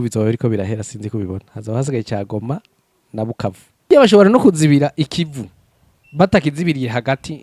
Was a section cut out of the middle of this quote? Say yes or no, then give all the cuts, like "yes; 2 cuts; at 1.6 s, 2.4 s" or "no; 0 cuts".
yes; 1 cut; at 3.9 s